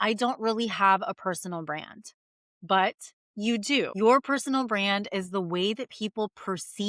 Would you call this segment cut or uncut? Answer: cut